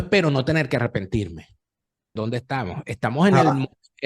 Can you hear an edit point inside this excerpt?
yes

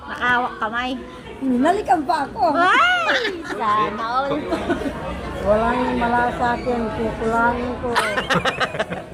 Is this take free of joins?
no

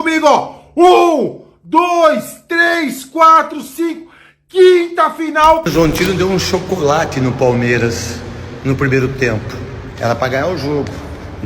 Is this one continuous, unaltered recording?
no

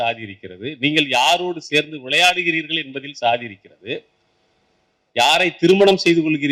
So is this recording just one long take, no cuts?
yes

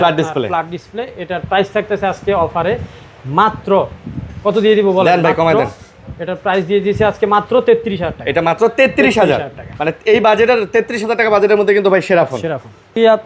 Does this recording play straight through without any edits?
yes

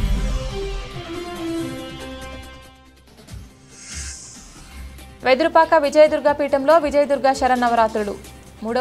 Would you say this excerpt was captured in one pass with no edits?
yes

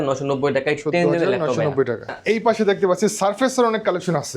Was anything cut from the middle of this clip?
no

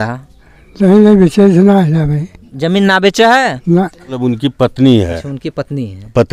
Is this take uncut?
no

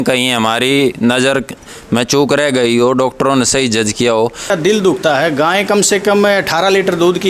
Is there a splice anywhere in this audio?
yes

